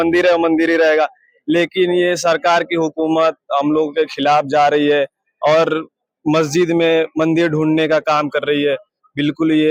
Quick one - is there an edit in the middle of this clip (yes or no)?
no